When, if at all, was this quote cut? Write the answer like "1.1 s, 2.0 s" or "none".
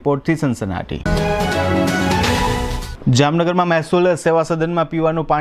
none